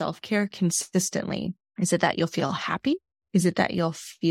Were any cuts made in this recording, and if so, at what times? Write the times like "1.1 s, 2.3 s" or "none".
1.6 s, 3.1 s